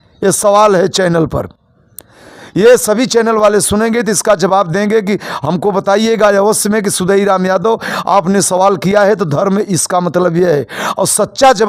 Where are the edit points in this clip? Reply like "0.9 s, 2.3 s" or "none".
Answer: none